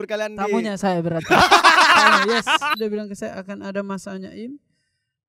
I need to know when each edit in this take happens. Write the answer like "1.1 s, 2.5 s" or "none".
2.8 s